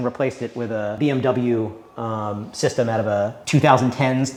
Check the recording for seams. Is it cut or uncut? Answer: uncut